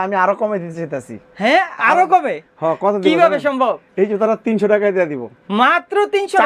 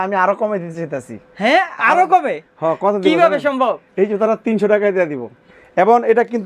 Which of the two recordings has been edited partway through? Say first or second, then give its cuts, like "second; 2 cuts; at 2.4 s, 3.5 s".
second; 1 cut; at 5.3 s